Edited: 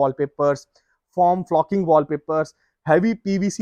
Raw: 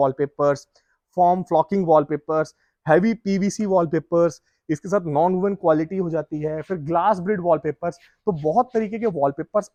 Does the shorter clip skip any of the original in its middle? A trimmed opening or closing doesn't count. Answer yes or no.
no